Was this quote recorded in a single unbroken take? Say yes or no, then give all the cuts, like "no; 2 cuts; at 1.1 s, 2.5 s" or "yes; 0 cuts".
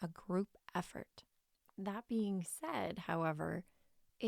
yes; 0 cuts